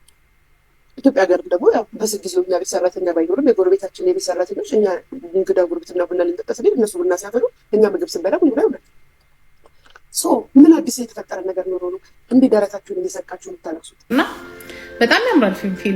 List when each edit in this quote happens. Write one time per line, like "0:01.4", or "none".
0:13.9